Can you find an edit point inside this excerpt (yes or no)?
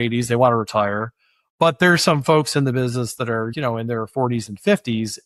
no